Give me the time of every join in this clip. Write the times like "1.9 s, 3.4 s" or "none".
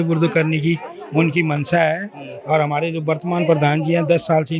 none